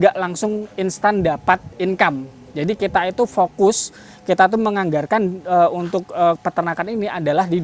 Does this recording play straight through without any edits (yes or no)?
yes